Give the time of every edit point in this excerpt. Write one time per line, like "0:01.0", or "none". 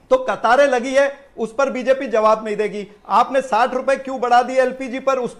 none